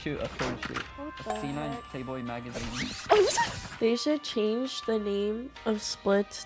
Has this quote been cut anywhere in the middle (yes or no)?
yes